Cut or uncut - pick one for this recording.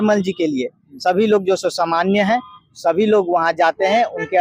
uncut